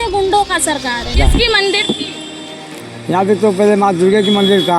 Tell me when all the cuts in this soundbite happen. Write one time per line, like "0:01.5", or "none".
0:01.2